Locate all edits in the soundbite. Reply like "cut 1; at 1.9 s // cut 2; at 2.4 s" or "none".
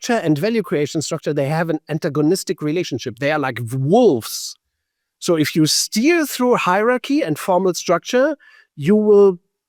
none